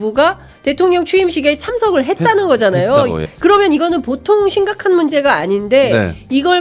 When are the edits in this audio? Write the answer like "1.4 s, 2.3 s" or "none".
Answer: 3.2 s